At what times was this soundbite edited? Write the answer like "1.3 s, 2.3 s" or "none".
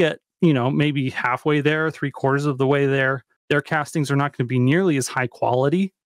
3.3 s